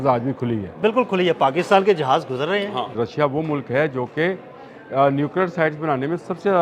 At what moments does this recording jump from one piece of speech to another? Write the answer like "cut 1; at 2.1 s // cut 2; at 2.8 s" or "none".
cut 1; at 2.9 s